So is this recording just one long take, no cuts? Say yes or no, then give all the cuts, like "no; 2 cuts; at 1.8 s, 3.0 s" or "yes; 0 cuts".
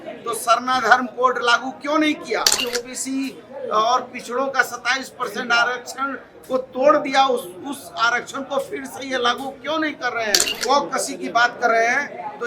no; 2 cuts; at 2.6 s, 10.6 s